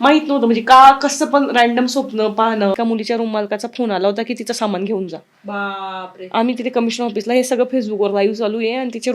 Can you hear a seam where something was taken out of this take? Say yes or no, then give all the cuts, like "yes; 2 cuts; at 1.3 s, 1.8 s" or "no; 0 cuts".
yes; 1 cut; at 2.7 s